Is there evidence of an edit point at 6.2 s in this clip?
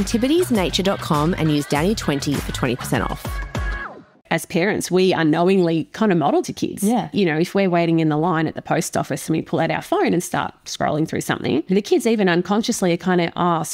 yes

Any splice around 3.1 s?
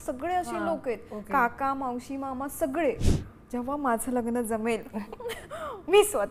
yes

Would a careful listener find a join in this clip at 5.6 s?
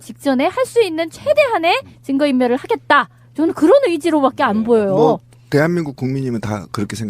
yes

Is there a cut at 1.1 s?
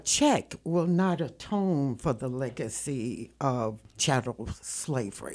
no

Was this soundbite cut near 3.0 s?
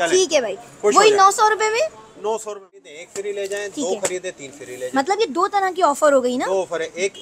yes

